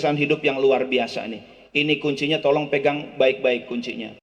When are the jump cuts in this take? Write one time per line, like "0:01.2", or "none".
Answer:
none